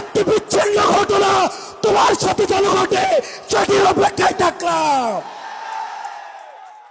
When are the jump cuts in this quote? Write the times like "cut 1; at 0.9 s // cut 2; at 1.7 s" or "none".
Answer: none